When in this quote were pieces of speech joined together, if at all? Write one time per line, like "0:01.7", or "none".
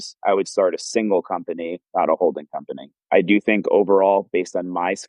none